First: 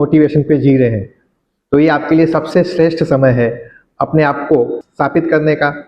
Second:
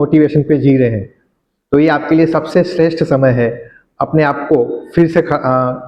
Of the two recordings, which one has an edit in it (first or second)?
first